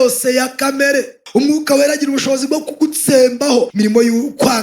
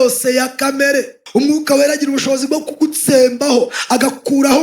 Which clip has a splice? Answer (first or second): first